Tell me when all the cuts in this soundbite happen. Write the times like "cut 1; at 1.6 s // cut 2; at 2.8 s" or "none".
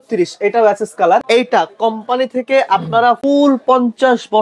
cut 1; at 1.2 s // cut 2; at 3.2 s